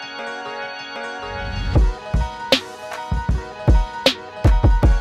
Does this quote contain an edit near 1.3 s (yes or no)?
yes